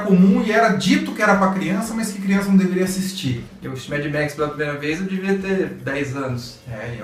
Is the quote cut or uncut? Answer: cut